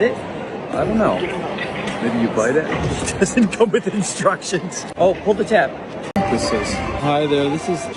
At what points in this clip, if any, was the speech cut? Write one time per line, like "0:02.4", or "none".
0:06.1